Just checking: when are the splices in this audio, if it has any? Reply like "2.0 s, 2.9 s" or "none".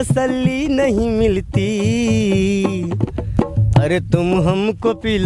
3.8 s